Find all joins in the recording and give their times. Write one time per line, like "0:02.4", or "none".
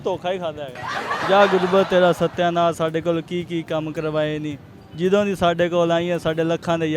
0:01.2